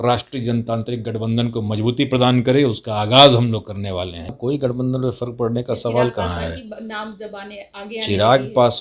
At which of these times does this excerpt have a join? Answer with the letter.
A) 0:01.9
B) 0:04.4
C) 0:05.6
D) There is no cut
B